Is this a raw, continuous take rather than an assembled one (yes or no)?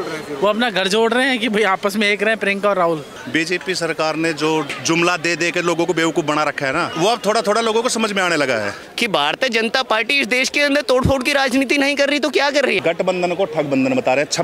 no